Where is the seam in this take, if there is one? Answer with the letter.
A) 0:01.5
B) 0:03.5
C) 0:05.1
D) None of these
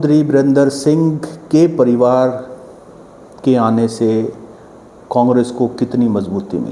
D